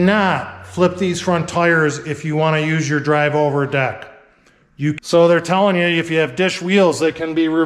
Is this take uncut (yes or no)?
no